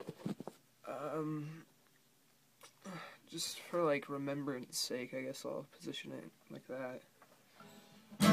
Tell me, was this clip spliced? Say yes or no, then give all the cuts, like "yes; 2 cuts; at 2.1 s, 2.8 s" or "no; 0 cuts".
no; 0 cuts